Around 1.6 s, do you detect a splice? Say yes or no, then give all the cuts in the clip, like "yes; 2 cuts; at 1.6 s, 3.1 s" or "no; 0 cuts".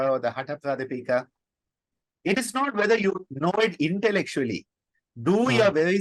no; 0 cuts